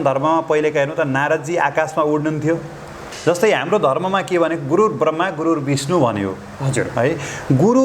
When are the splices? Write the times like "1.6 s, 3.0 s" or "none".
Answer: 3.1 s